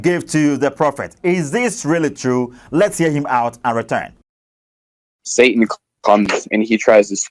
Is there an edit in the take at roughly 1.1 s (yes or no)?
no